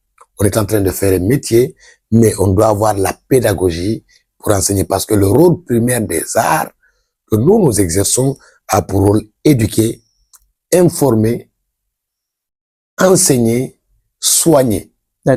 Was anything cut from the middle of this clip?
no; 0 cuts

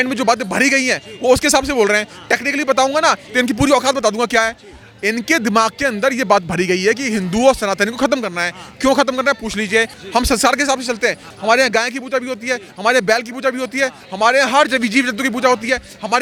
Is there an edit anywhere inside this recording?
no; 0 cuts

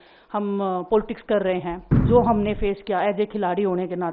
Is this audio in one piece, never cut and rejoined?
no; 1 cut; at 2.1 s

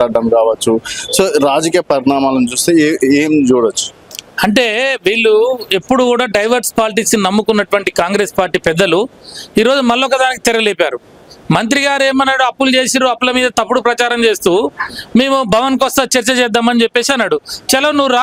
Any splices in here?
no; 0 cuts

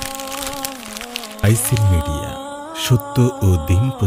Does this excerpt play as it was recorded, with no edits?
yes; 0 cuts

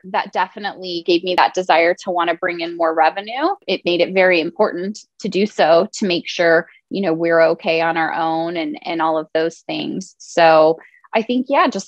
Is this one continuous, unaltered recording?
no; 2 cuts; at 1.4 s, 3.6 s

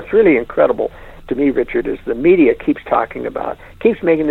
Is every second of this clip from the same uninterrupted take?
yes; 0 cuts

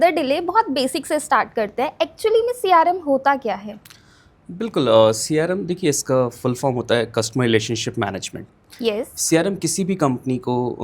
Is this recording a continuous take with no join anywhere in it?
yes; 0 cuts

